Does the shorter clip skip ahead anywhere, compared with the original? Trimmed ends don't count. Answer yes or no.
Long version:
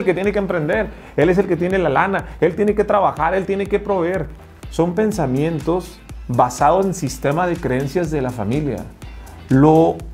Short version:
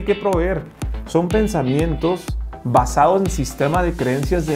no